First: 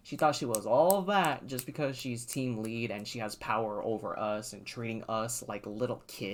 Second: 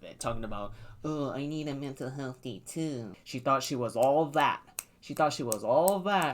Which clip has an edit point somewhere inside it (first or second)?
second